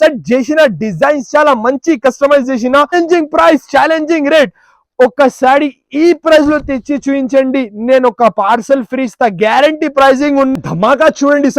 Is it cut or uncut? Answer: cut